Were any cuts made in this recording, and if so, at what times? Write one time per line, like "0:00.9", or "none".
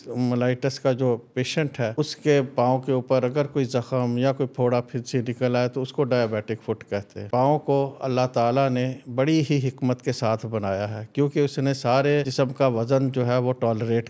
0:01.9
0:07.2
0:12.3